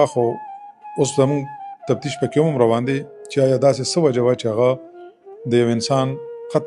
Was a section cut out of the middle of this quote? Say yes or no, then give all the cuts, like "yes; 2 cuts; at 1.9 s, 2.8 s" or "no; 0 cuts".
no; 0 cuts